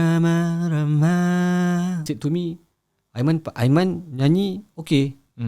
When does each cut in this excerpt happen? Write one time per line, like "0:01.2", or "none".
0:02.0